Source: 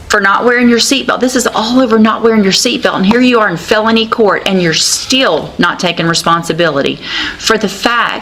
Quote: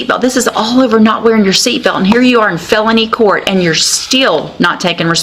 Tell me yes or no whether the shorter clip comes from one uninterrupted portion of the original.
yes